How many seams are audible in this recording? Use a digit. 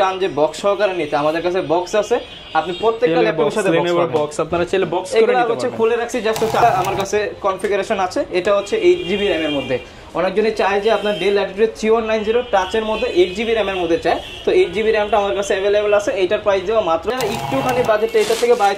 2